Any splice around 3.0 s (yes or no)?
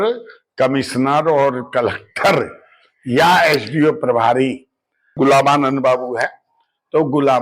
no